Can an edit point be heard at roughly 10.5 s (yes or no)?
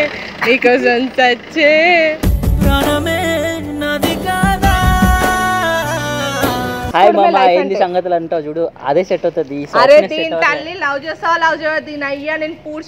no